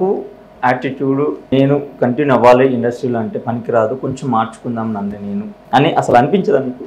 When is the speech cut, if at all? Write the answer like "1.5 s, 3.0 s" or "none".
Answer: 1.5 s, 5.6 s